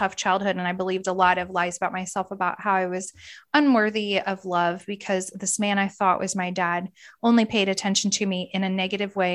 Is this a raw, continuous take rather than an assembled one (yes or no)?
yes